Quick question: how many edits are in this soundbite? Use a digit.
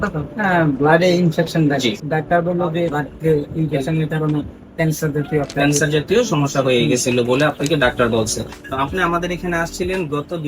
3